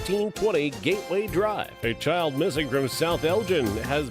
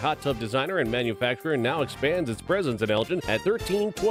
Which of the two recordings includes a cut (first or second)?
first